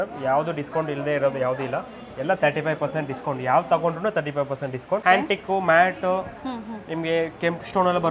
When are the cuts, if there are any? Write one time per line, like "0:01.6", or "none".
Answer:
0:05.0